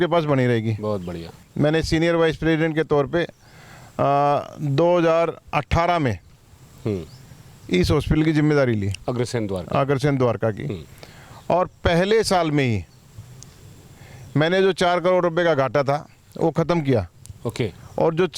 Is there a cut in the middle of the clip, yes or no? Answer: yes